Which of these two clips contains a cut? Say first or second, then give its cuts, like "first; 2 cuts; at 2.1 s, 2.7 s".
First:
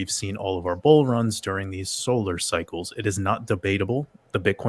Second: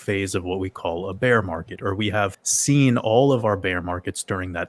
second; 1 cut; at 2.5 s